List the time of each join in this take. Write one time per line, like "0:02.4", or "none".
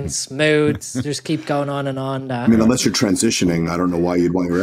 none